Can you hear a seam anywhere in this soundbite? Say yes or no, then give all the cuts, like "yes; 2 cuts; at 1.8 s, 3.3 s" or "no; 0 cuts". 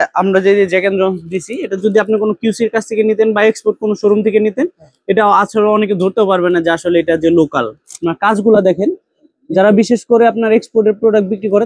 no; 0 cuts